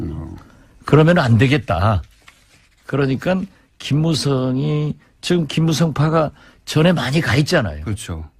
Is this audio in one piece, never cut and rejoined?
no; 1 cut; at 6.1 s

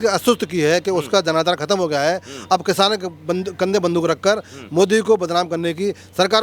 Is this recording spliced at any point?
no; 0 cuts

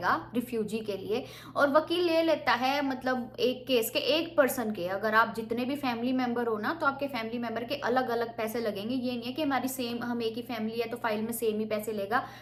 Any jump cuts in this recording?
no; 0 cuts

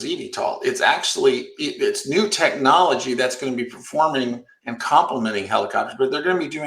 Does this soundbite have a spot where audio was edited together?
no; 0 cuts

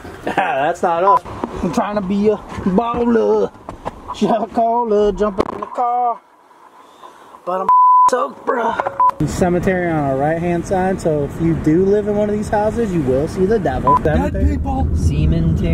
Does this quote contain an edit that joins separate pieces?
yes; 3 cuts; at 1.2 s, 9.1 s, 14.0 s

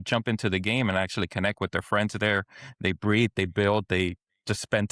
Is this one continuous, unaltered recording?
yes; 0 cuts

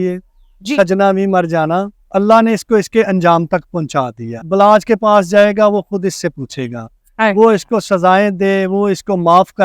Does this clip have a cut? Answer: yes; 2 cuts; at 2.0 s, 4.4 s

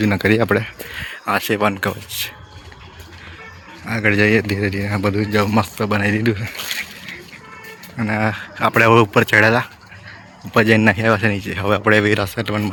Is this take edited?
no; 0 cuts

